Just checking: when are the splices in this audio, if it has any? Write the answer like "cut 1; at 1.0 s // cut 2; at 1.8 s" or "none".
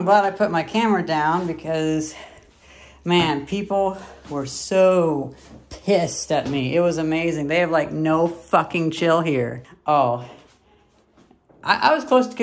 cut 1; at 9.7 s